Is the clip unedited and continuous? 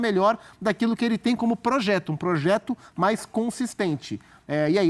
yes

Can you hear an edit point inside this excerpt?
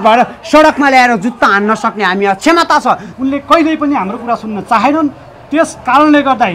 yes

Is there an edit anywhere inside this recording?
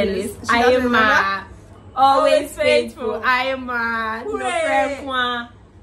no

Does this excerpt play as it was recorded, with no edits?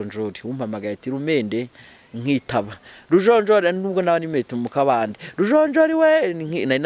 yes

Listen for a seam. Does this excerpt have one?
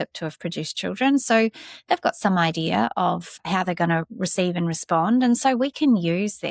yes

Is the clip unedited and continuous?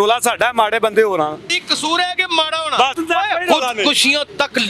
no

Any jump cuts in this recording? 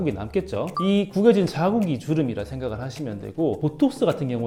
no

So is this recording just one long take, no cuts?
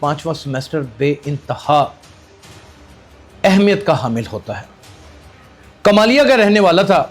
no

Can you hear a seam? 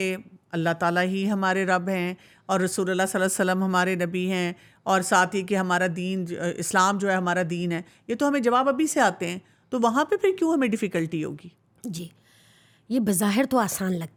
no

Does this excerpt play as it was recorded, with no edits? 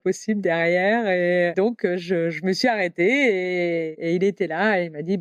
no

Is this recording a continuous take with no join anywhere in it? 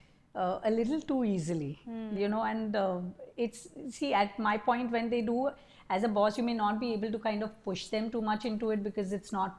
yes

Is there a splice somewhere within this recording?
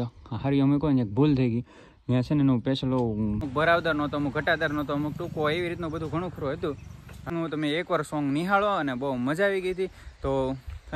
yes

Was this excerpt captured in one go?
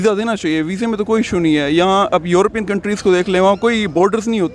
yes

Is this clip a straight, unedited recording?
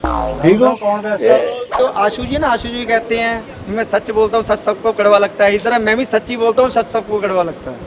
no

